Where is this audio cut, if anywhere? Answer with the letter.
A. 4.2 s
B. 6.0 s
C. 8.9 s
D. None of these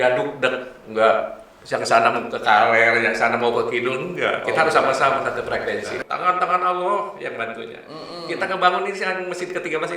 B